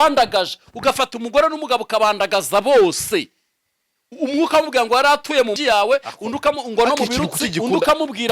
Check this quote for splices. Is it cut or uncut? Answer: cut